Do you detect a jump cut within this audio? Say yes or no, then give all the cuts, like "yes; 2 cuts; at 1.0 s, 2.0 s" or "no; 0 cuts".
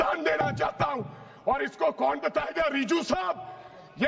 no; 0 cuts